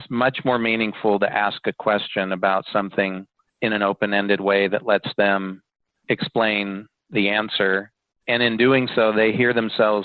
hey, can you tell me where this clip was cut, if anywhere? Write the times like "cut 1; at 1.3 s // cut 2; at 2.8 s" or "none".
none